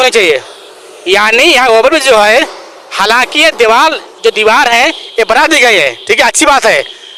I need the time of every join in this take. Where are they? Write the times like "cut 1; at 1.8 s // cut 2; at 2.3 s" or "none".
none